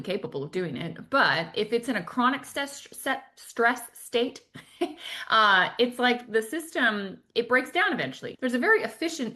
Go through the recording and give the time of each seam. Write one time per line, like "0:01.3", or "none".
0:08.3